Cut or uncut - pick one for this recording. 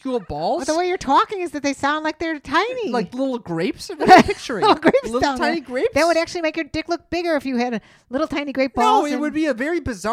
uncut